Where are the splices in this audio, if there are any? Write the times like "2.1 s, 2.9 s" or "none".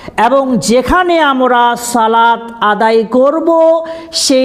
none